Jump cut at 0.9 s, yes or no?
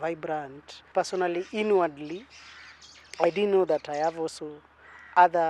yes